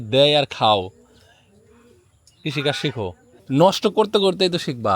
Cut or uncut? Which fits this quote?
cut